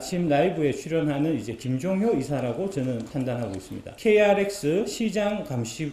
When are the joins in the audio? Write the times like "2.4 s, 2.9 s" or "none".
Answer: 3.9 s